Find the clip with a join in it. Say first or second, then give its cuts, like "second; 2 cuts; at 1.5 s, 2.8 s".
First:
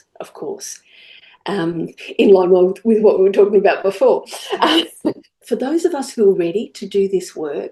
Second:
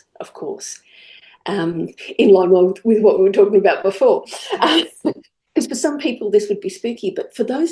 first; 1 cut; at 5.4 s